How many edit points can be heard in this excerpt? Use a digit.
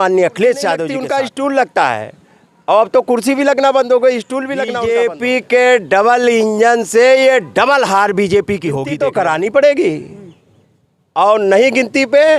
3